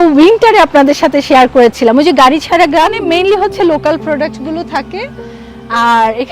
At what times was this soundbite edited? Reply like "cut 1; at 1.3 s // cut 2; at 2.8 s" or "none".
cut 1; at 2.9 s